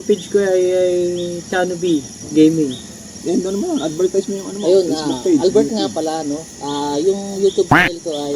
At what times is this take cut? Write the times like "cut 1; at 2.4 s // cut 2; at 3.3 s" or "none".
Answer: cut 1; at 3.2 s